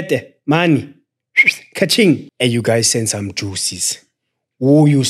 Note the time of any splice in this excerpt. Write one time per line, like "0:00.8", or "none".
0:02.3

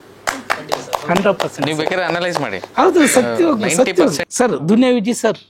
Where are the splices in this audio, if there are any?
0:04.2

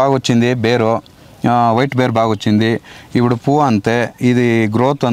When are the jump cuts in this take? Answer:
none

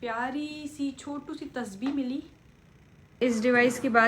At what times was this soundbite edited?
0:03.1

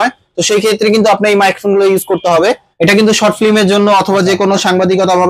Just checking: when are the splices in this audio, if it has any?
0:02.7

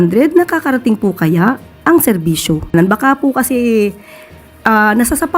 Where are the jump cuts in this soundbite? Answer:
0:02.7

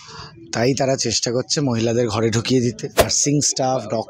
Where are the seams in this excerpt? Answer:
0:03.1

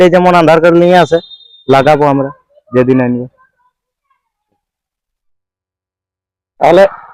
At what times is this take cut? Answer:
none

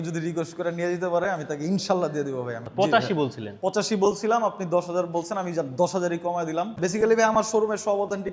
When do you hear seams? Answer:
0:02.6
0:06.7

